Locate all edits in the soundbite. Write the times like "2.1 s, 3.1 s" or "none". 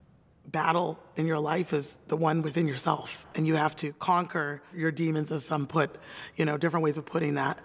3.2 s, 4.8 s